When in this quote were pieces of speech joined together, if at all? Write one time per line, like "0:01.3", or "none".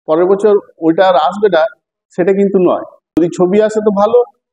0:03.1